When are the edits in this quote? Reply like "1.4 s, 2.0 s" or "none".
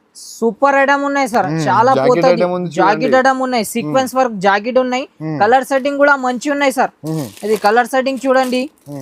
none